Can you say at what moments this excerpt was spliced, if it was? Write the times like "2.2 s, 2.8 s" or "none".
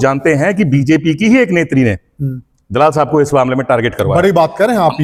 none